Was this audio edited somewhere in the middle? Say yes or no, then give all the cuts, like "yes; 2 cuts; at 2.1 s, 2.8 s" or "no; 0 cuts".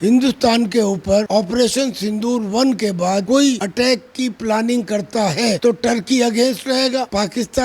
no; 0 cuts